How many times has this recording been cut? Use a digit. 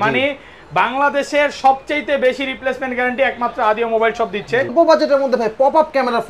1